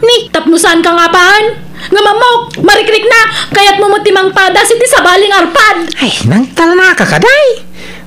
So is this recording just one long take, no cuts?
no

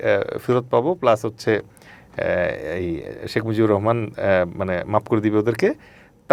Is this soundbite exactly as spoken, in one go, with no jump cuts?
yes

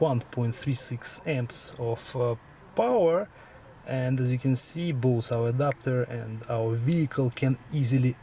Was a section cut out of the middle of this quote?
no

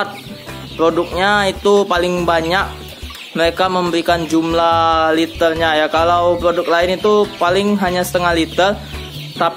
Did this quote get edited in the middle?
no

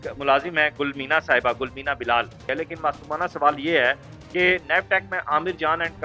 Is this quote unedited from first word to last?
no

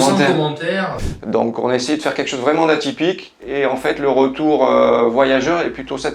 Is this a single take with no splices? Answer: no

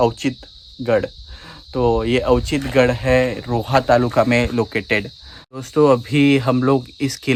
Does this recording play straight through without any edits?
yes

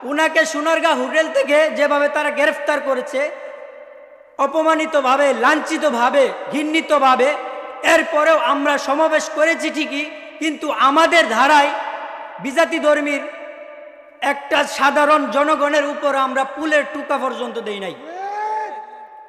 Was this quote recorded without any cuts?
yes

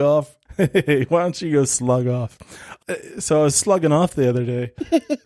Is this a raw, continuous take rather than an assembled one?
yes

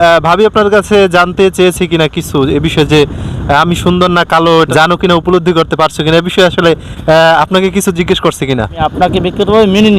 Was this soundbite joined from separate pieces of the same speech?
yes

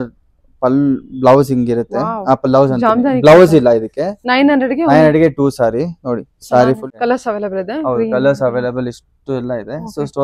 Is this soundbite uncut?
no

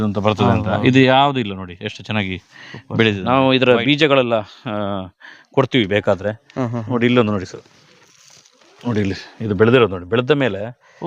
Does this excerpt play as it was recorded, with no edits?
no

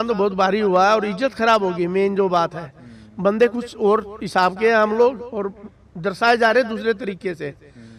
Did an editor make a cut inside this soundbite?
no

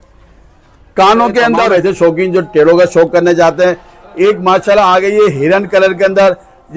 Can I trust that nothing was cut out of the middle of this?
no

